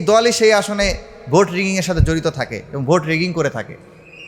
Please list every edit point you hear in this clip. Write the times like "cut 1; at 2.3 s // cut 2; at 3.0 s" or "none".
none

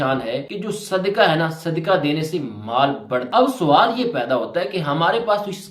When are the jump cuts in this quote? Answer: cut 1; at 3.3 s

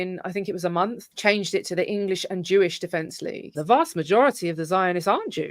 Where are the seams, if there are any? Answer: cut 1; at 3.5 s

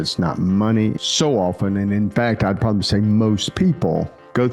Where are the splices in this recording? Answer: cut 1; at 1.0 s

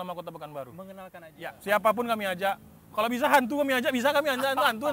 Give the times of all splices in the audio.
cut 1; at 1.3 s

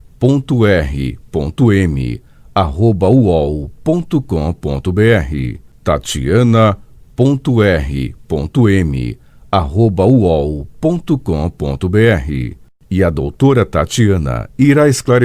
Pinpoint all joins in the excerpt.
cut 1; at 5.3 s

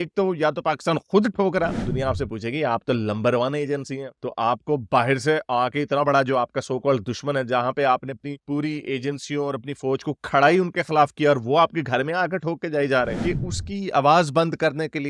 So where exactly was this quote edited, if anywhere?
cut 1; at 1.8 s // cut 2; at 13.2 s

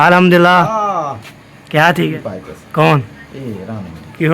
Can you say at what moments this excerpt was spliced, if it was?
cut 1; at 2.1 s

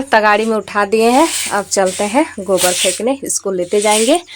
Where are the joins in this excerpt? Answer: none

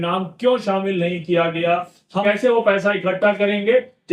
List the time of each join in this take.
cut 1; at 2.2 s

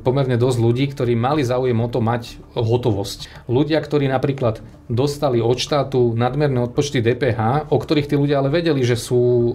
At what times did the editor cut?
cut 1; at 3.2 s

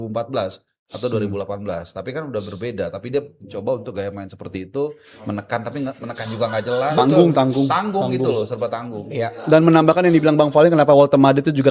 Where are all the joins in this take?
none

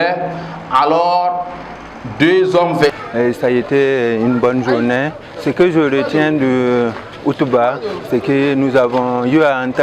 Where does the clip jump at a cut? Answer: cut 1; at 2.9 s

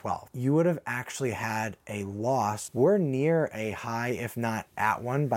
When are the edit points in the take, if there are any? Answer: cut 1; at 2.6 s

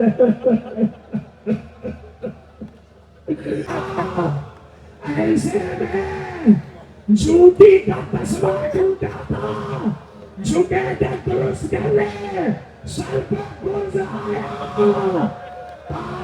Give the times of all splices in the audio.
cut 1; at 3.7 s

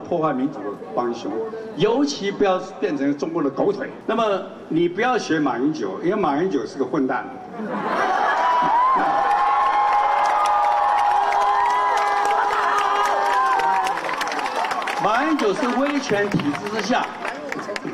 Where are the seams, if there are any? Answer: cut 1; at 3.9 s

